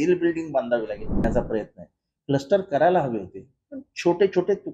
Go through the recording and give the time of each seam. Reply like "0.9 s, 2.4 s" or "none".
1.2 s